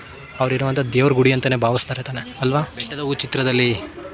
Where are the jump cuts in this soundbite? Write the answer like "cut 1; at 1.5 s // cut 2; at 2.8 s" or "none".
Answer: cut 1; at 2.9 s